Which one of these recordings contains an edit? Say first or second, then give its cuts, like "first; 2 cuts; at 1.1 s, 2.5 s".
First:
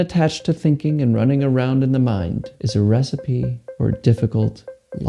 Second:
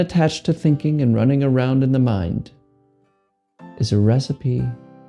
first; 2 cuts; at 2.6 s, 3.6 s